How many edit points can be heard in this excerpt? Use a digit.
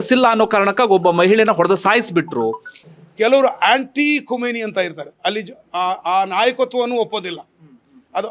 1